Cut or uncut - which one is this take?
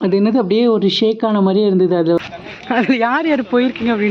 cut